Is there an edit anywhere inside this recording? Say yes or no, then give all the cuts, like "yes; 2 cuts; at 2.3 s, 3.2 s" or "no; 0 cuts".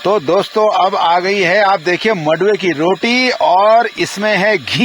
no; 0 cuts